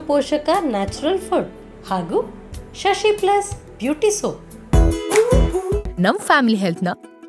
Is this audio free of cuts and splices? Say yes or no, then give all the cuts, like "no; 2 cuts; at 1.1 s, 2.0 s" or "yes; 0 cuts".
no; 1 cut; at 4.5 s